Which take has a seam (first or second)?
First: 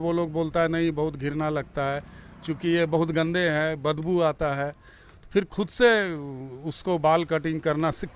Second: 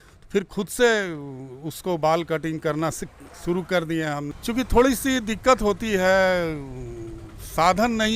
second